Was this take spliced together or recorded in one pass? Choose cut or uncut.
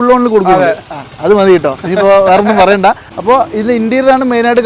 cut